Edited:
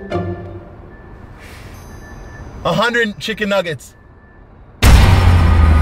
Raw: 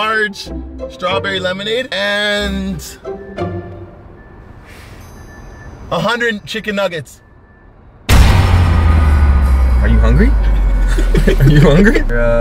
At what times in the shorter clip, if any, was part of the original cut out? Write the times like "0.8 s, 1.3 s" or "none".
none